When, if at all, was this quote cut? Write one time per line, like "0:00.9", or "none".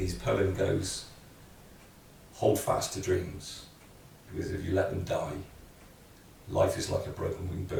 none

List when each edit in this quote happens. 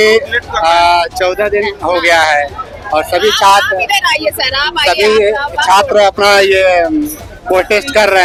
none

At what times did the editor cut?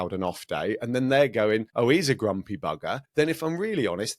0:01.7
0:03.0

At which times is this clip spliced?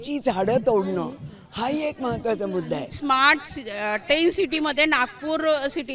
0:03.0

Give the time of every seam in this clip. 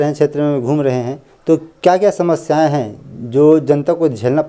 none

